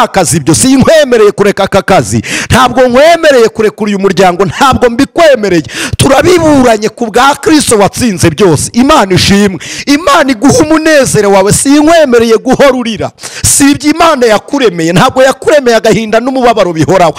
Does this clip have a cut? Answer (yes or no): no